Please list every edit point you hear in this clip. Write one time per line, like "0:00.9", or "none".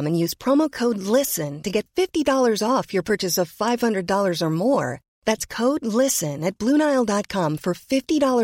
none

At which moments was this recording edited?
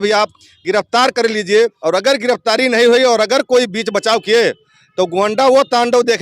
0:01.8

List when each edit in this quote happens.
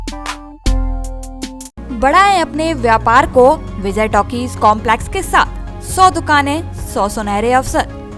none

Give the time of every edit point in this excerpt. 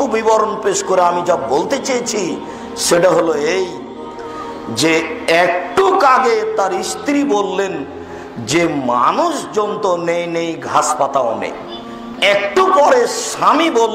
0:12.0

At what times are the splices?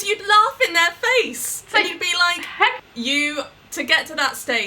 0:02.8

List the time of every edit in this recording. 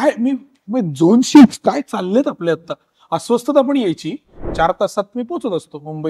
0:04.4

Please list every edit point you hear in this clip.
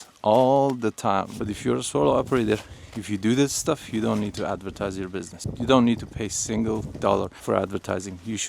0:01.3
0:05.4
0:07.4

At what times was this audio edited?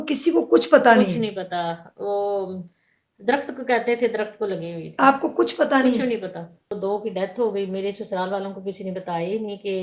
0:06.8

